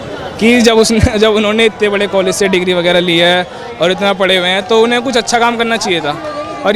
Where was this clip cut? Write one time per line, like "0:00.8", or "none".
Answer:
none